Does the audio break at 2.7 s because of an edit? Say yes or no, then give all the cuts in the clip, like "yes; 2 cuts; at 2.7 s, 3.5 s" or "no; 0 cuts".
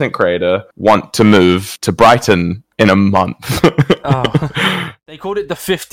no; 1 cut; at 4.9 s